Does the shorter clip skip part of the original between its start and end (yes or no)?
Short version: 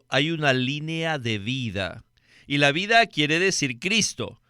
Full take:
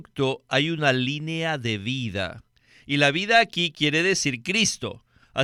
yes